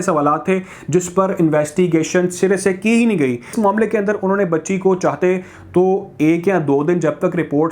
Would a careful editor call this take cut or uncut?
cut